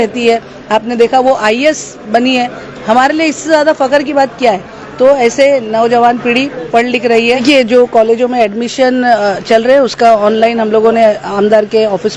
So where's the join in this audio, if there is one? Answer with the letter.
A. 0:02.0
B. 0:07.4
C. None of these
B